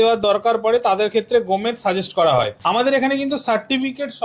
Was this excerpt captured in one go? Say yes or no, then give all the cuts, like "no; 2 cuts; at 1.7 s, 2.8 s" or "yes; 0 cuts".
no; 1 cut; at 2.6 s